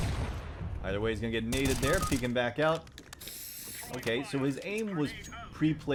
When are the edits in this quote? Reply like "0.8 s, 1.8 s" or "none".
none